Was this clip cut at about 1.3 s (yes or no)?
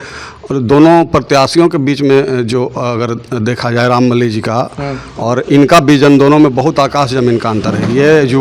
no